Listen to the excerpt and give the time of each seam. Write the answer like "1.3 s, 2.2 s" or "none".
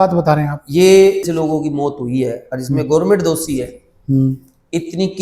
1.3 s